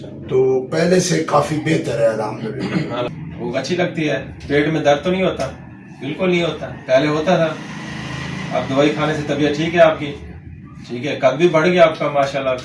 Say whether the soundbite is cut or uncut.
cut